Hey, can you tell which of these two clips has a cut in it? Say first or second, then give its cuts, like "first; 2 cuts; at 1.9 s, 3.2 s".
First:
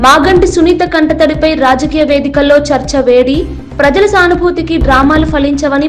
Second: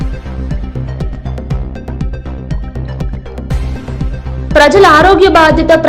second; 1 cut; at 3.9 s